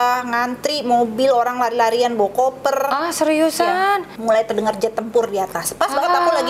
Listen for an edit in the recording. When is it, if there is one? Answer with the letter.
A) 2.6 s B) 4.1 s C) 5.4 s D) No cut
B